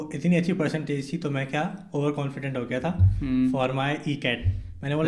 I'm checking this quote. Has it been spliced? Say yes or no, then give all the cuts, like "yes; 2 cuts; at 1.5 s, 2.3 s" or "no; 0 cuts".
no; 0 cuts